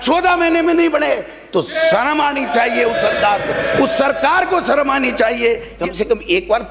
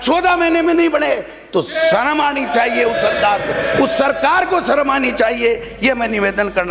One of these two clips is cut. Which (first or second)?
first